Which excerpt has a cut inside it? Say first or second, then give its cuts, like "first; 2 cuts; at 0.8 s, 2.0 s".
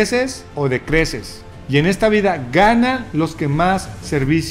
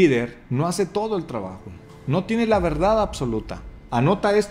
second; 1 cut; at 3.6 s